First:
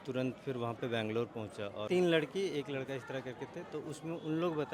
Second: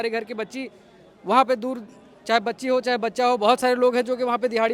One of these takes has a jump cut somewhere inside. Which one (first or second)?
first